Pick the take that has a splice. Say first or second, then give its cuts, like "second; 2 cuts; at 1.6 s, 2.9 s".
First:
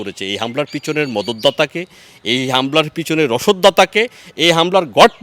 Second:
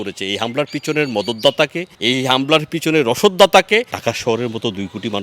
second; 2 cuts; at 1.9 s, 4.0 s